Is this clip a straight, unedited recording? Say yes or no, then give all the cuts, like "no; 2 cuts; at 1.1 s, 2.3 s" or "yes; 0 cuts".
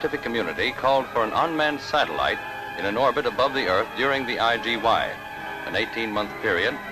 no; 1 cut; at 5.6 s